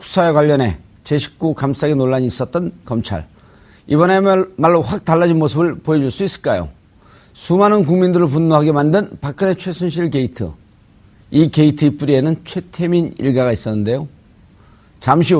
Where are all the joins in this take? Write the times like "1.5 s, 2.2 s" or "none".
none